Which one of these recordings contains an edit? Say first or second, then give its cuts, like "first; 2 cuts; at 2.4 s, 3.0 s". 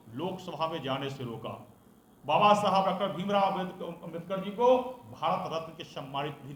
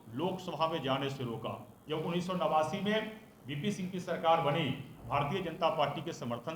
second; 1 cut; at 1.7 s